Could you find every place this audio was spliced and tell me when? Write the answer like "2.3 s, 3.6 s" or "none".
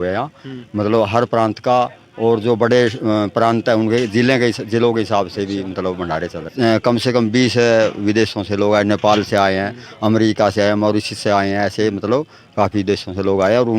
6.5 s